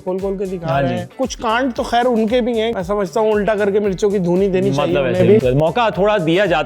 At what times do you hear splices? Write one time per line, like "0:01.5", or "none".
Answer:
0:01.1
0:02.7
0:05.4